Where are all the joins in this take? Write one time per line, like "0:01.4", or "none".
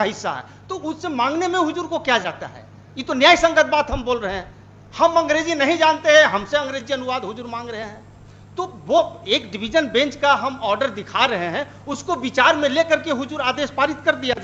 none